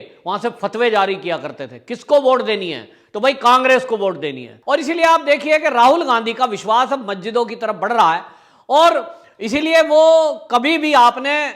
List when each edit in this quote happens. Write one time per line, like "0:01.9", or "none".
0:04.5